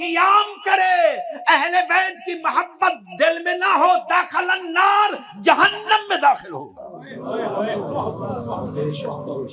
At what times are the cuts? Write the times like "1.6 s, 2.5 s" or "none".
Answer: none